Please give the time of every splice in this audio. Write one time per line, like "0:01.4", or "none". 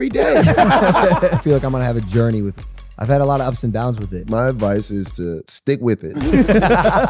0:01.4
0:02.6
0:04.1
0:06.0